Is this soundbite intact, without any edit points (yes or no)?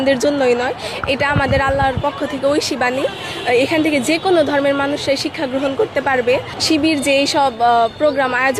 yes